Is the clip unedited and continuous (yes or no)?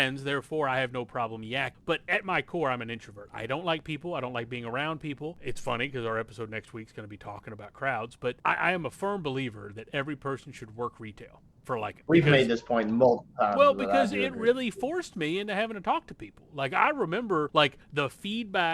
no